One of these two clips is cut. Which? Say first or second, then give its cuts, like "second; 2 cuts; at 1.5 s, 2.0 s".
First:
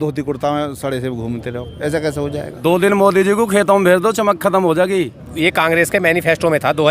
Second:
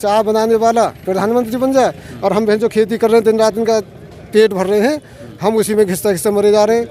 first; 2 cuts; at 2.5 s, 5.2 s